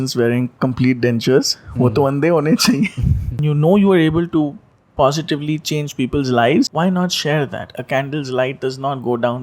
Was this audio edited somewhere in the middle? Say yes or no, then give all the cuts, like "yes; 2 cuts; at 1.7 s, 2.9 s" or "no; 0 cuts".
yes; 2 cuts; at 3.4 s, 6.7 s